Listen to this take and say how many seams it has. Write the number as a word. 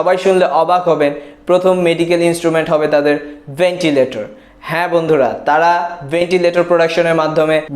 zero